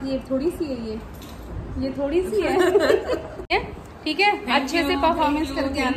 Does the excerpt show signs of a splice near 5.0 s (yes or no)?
no